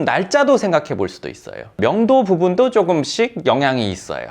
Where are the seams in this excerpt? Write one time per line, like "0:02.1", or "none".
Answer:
0:01.8